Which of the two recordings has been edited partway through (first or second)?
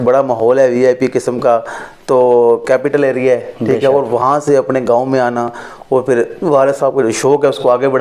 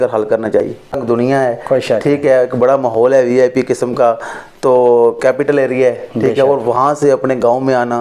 second